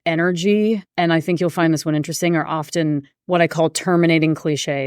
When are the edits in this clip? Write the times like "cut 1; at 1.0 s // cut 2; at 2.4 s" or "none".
cut 1; at 0.9 s // cut 2; at 3.1 s